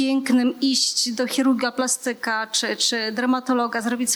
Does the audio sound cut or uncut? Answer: uncut